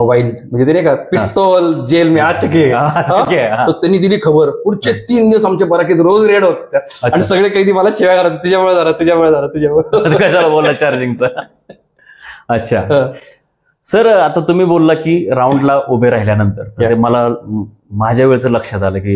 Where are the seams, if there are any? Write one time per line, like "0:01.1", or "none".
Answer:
none

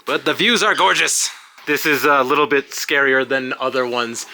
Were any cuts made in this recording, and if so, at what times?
0:01.5

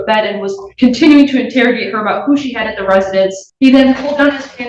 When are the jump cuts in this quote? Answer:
0:03.4

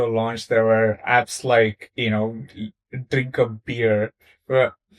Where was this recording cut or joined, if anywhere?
none

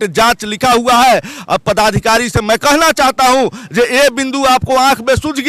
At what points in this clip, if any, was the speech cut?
none

